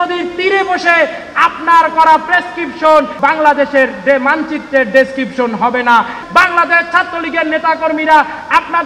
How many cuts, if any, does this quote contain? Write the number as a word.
two